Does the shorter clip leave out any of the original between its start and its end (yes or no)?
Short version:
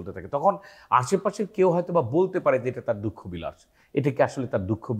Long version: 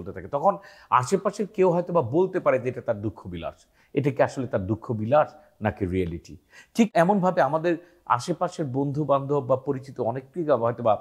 no